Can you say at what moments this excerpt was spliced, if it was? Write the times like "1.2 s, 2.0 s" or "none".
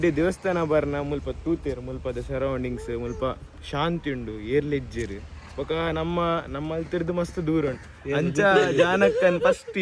none